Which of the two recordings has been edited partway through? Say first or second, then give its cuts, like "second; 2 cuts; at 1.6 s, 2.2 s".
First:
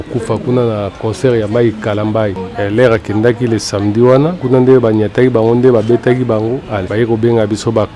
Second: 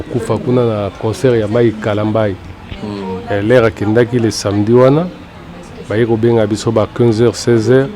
first; 3 cuts; at 2.4 s, 4.4 s, 6.8 s